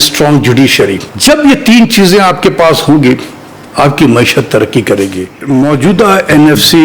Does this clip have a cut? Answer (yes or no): yes